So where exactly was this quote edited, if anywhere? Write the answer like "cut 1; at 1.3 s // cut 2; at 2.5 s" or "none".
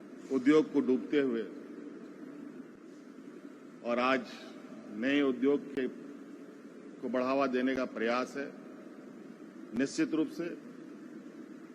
cut 1; at 2.8 s